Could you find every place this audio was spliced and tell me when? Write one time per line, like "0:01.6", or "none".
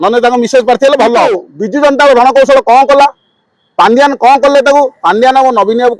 0:01.5